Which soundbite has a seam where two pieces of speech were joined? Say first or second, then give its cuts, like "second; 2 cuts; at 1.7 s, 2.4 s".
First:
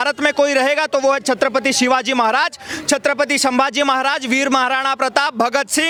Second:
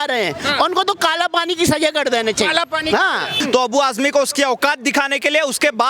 second; 1 cut; at 3.3 s